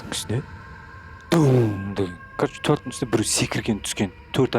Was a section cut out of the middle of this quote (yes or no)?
yes